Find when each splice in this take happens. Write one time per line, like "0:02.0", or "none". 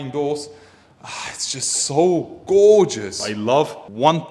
0:03.4